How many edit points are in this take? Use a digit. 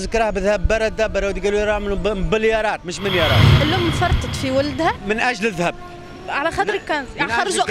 1